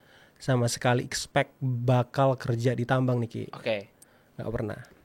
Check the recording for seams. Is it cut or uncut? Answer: uncut